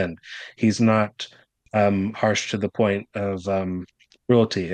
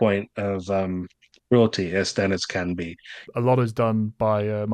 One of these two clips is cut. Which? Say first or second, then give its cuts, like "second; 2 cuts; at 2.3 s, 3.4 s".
second; 1 cut; at 3.2 s